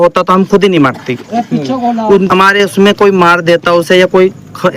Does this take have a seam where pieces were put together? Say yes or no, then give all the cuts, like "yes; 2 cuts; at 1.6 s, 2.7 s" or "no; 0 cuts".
yes; 1 cut; at 2.3 s